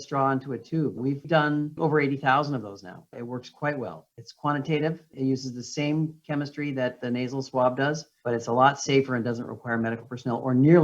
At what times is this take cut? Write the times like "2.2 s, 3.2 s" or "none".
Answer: 1.0 s, 1.8 s, 5.1 s